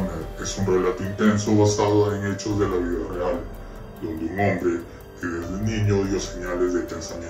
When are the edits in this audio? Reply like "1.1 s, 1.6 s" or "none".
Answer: none